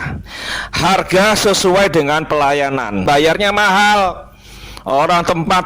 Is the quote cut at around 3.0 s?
yes; 1 cut; at 3.0 s

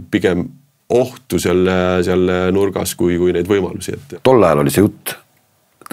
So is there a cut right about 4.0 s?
yes; 1 cut; at 4.0 s

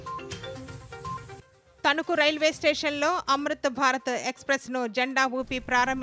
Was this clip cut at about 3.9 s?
no; 1 cut; at 1.6 s

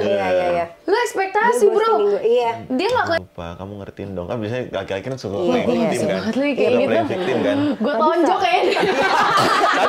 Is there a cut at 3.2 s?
yes; 1 cut; at 3.2 s

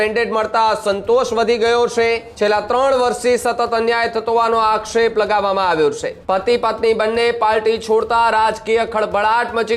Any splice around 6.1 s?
yes; 2 cuts; at 2.3 s, 6.1 s

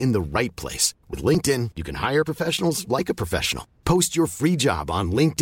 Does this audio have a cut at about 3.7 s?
no; 0 cuts

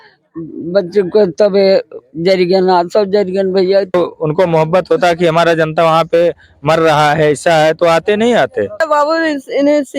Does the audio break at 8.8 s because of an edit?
yes; 2 cuts; at 3.9 s, 8.8 s

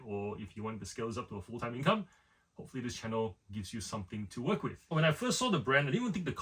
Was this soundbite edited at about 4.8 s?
yes; 1 cut; at 4.8 s

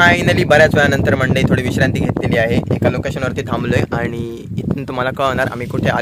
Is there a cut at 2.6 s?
no; 0 cuts

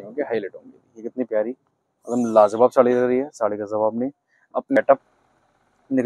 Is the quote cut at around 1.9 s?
no; 1 cut; at 4.8 s

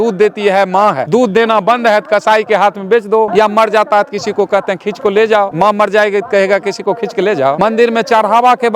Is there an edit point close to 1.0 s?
yes; 4 cuts; at 1.0 s, 3.3 s, 5.5 s, 7.6 s

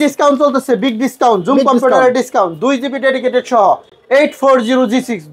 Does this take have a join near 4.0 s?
no; 0 cuts

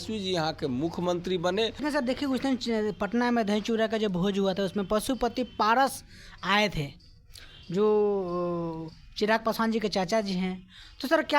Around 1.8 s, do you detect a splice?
yes; 1 cut; at 1.8 s

